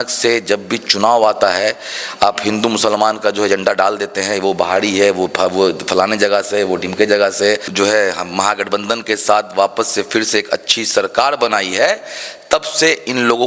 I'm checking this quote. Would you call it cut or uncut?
cut